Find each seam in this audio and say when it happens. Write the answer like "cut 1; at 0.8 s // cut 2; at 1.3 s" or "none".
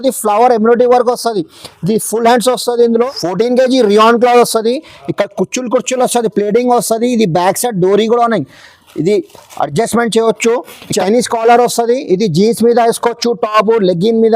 cut 1; at 3.1 s // cut 2; at 10.9 s